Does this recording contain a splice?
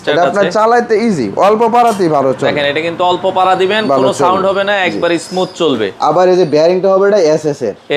no; 0 cuts

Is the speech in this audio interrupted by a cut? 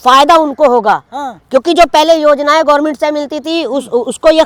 no; 0 cuts

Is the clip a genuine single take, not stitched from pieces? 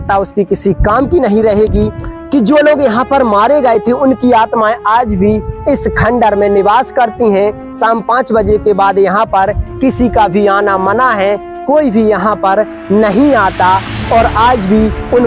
no; 1 cut; at 1.8 s

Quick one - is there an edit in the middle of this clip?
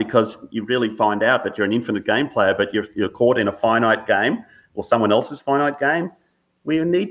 no; 0 cuts

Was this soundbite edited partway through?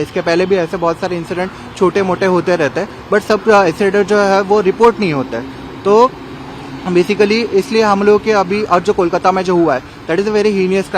no; 0 cuts

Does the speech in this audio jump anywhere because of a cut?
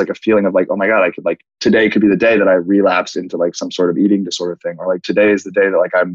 no; 0 cuts

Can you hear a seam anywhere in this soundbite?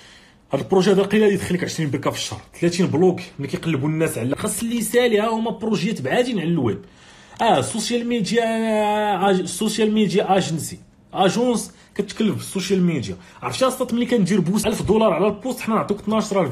yes; 2 cuts; at 4.3 s, 14.6 s

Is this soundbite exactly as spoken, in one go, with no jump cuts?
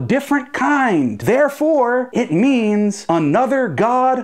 no; 1 cut; at 1.2 s

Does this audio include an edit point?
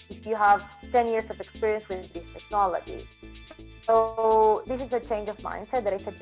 no; 0 cuts

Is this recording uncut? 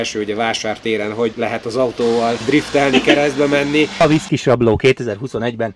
no; 3 cuts; at 1.3 s, 2.4 s, 4.0 s

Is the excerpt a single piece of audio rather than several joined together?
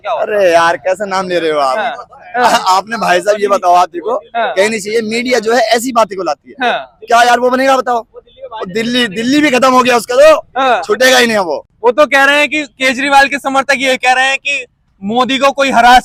yes; 0 cuts

